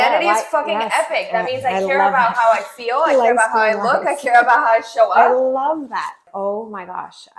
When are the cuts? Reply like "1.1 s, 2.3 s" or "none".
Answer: 6.3 s

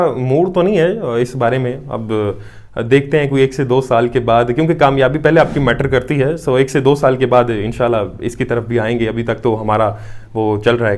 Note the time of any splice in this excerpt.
none

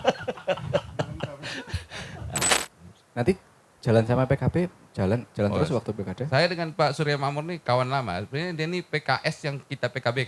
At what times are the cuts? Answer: 2.6 s

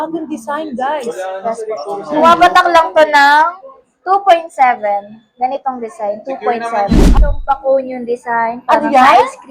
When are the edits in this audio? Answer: 7.1 s

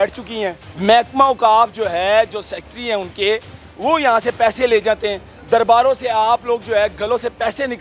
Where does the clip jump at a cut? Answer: none

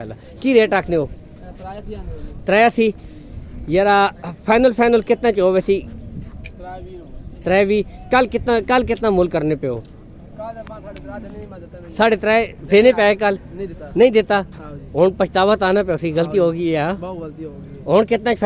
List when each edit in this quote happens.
none

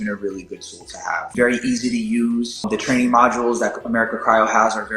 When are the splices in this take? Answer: 1.3 s, 2.6 s

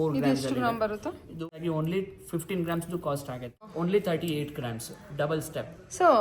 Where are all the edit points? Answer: 1.4 s, 3.6 s

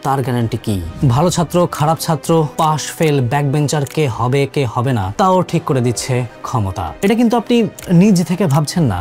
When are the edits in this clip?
0.9 s, 6.9 s

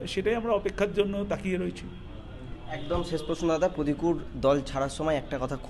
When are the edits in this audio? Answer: none

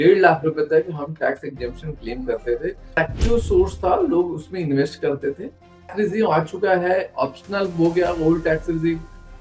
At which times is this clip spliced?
3.0 s, 5.9 s

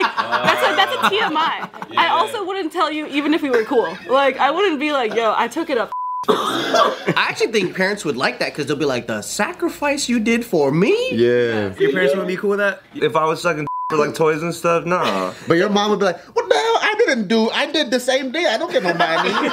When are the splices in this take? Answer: 7.1 s, 11.7 s, 12.9 s

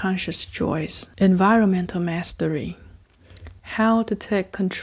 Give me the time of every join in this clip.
1.0 s, 3.4 s

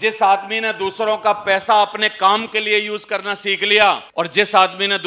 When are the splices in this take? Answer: 4.1 s

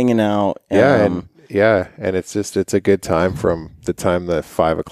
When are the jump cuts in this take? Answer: none

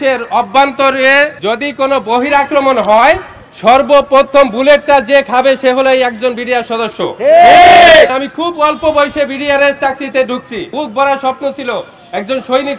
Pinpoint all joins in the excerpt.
1.4 s, 8.1 s, 10.7 s

